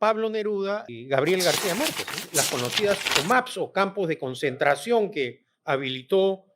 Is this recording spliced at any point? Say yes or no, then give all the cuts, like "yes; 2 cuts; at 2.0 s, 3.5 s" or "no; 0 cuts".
yes; 2 cuts; at 0.9 s, 2.2 s